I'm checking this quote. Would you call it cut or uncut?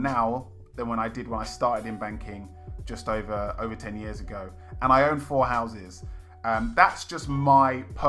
uncut